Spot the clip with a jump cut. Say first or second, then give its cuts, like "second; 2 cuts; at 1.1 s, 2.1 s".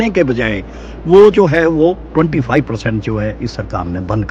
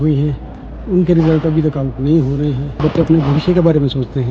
second; 1 cut; at 2.8 s